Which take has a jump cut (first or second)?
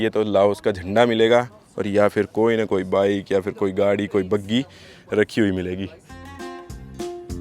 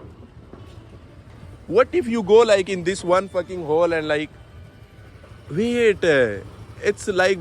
first